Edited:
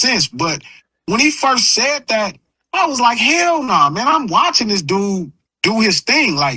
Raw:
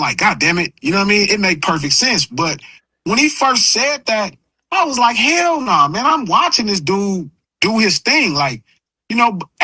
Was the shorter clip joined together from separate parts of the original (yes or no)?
no